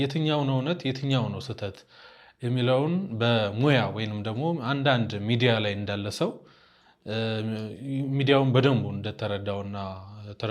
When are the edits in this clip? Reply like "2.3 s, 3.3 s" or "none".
none